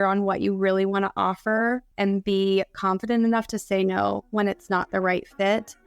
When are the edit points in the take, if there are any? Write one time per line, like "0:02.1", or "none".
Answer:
0:01.9